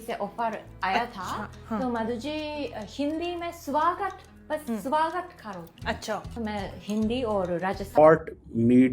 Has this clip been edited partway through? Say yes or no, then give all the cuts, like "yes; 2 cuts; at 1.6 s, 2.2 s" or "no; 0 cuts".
yes; 1 cut; at 8.0 s